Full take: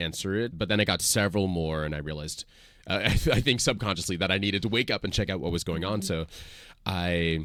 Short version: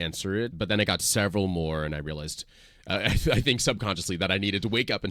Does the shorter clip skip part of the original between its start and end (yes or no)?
no